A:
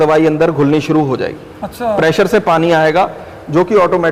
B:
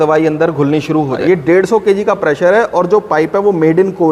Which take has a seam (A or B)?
B